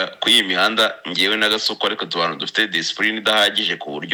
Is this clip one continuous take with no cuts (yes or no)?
yes